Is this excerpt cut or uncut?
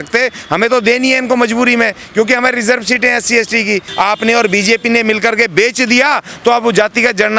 cut